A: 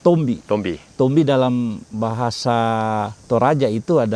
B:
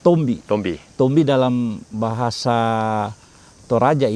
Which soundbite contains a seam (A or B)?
A